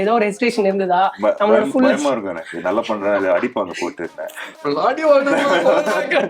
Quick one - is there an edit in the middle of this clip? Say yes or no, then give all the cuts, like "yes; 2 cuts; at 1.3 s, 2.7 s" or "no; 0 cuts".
yes; 1 cut; at 4.6 s